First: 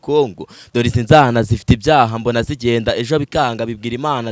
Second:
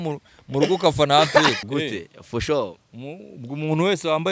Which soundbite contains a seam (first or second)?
second